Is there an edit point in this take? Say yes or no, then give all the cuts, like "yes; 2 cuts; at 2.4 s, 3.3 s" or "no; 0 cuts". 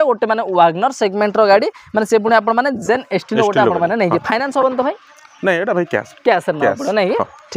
no; 0 cuts